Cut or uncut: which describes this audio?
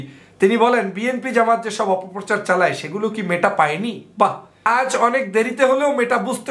cut